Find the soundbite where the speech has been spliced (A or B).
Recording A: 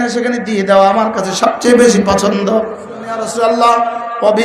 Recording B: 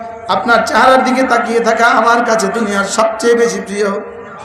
A